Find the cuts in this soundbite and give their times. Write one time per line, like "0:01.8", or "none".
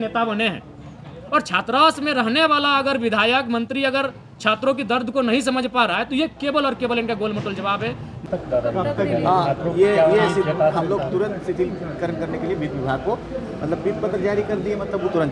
0:08.2